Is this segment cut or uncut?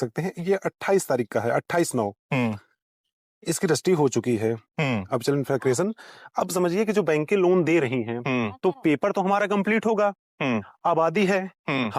uncut